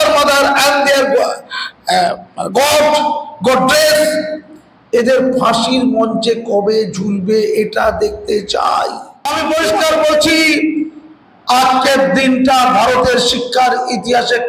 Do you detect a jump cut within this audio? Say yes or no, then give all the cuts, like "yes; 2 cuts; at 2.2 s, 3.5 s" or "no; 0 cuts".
yes; 1 cut; at 9.3 s